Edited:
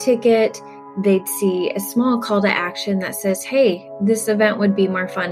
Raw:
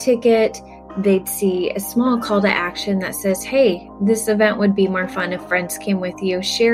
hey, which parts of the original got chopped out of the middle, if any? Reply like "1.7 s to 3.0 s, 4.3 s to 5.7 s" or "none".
none

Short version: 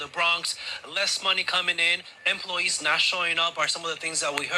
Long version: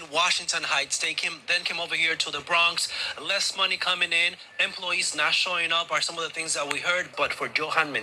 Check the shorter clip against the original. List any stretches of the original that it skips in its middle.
none

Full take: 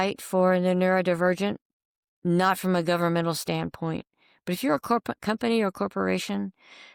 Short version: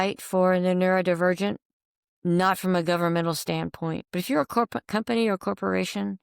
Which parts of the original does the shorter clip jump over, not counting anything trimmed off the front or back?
4.0 s to 4.4 s

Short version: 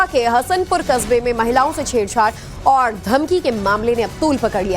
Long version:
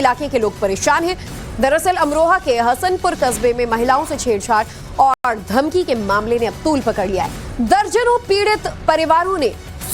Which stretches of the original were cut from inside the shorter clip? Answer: 5.2 s to 5.3 s

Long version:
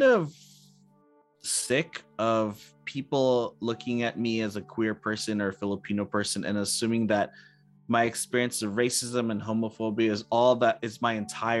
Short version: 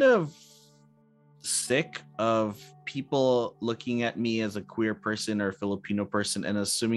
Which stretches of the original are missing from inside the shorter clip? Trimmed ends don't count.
none

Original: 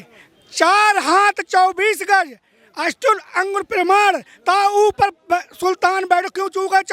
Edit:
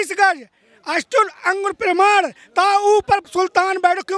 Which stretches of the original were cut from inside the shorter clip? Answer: 5.2 s to 5.5 s

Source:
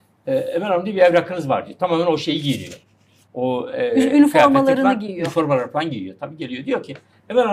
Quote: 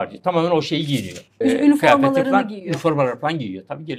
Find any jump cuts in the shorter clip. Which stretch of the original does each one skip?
2.9 s to 3.9 s

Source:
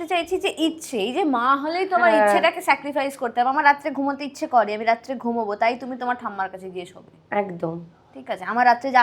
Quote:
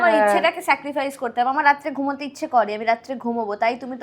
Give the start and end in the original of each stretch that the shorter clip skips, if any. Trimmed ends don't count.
none

